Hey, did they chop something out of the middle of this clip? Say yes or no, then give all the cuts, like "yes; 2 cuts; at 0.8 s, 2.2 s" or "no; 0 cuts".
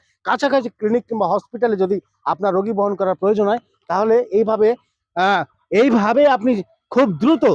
no; 0 cuts